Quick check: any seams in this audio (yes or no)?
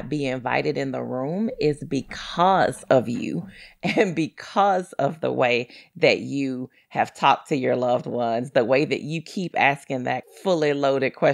yes